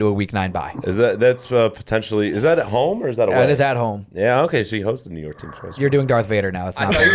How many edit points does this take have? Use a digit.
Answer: 0